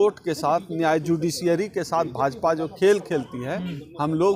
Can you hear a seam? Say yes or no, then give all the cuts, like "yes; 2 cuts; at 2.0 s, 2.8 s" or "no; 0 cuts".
no; 0 cuts